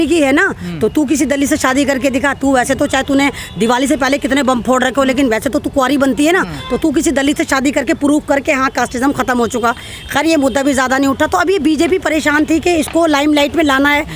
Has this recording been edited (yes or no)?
no